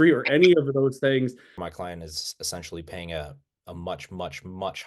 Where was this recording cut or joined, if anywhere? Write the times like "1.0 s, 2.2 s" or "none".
1.7 s